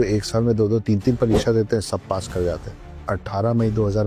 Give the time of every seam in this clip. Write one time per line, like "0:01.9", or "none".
0:03.0

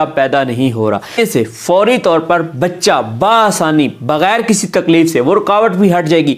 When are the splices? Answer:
0:01.2

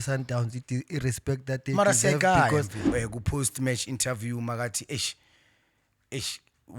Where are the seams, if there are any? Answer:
0:02.8

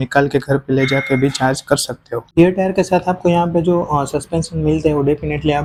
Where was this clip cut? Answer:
none

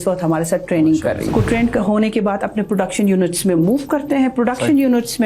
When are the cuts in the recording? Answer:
0:01.3

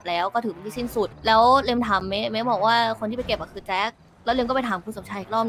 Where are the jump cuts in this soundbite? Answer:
0:01.2

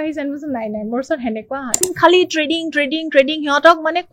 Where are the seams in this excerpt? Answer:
0:01.8

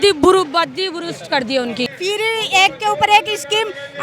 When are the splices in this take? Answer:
0:01.9

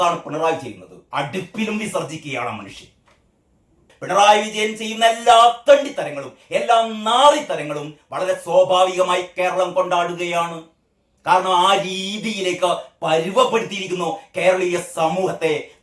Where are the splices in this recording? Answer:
0:03.9

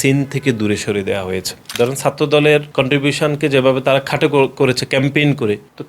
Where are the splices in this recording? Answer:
0:01.6

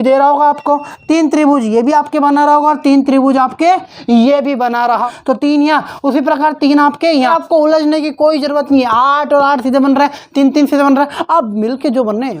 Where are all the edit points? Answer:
0:05.0
0:07.3

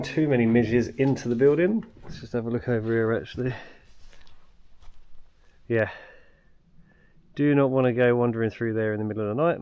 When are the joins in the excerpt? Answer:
0:02.1
0:05.5

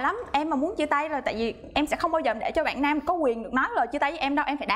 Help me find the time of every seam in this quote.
none

